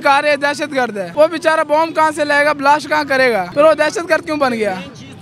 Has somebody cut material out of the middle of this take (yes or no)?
yes